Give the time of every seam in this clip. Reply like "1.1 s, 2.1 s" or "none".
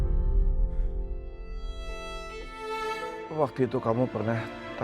3.2 s